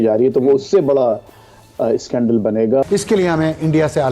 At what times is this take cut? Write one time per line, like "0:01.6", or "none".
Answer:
0:02.8